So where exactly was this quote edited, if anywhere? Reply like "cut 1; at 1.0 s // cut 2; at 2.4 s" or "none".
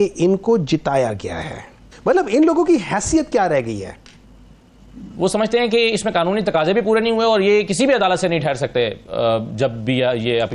cut 1; at 1.9 s // cut 2; at 5.0 s

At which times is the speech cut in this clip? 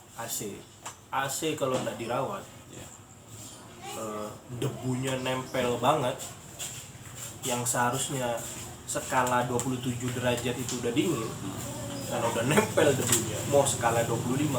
none

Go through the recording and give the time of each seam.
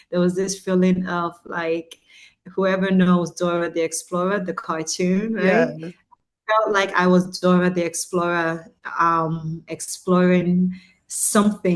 none

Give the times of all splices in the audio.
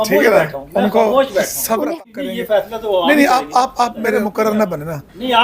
cut 1; at 2.0 s // cut 2; at 4.3 s

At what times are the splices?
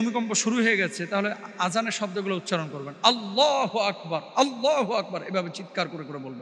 none

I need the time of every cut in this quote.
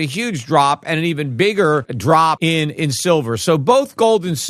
cut 1; at 2.2 s

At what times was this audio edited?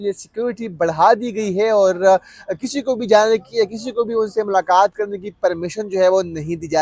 none

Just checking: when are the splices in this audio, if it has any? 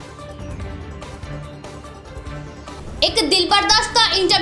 cut 1; at 1.5 s

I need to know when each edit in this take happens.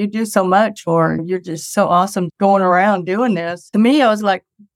cut 1; at 1.2 s // cut 2; at 2.3 s // cut 3; at 3.6 s

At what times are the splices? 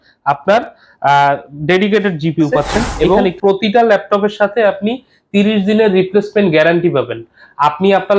cut 1; at 2.9 s

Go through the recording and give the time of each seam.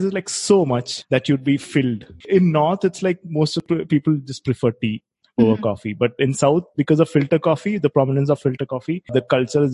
cut 1; at 2.1 s // cut 2; at 3.6 s

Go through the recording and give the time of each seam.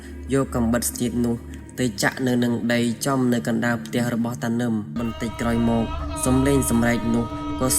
cut 1; at 5.0 s

